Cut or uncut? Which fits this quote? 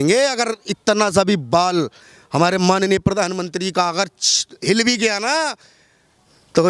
uncut